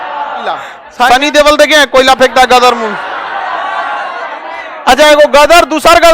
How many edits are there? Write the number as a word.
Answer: one